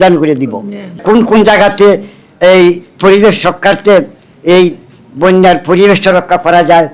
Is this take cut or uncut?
cut